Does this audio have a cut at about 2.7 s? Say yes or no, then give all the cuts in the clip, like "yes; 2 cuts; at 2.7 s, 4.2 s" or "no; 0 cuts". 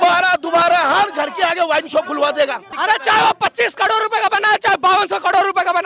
yes; 1 cut; at 2.7 s